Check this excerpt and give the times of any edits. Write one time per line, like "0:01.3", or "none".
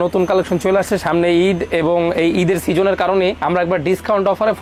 none